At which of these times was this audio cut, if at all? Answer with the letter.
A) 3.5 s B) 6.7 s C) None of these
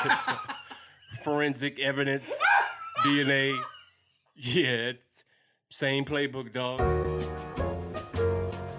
B